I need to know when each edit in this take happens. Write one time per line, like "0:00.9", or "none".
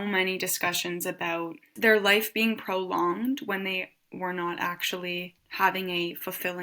0:01.7
0:05.4